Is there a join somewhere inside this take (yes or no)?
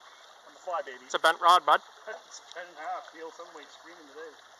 no